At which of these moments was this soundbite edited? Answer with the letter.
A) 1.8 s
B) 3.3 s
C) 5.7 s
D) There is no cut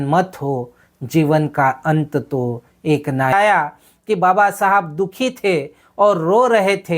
B